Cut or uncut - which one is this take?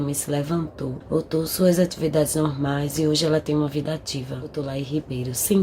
cut